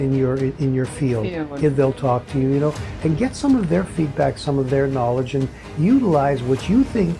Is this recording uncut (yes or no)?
yes